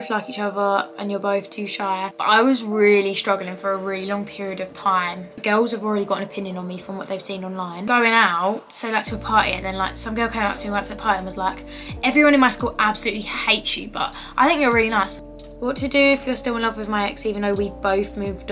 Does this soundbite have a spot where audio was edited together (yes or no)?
yes